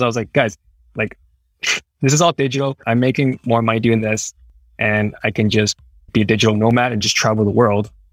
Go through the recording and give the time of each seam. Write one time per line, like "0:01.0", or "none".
0:06.1